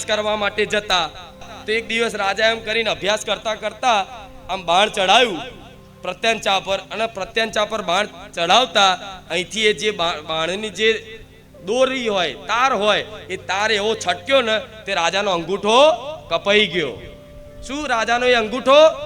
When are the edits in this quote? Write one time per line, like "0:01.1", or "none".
0:01.5